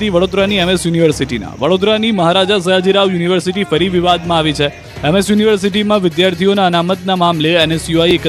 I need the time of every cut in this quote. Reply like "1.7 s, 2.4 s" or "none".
none